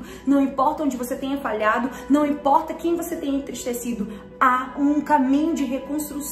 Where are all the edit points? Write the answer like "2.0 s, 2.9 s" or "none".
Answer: 4.7 s